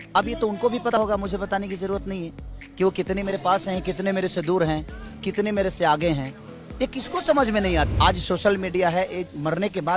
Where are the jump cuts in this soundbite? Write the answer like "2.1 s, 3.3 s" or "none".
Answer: 1.0 s, 7.9 s